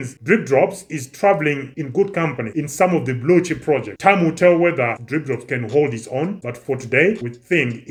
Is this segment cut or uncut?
uncut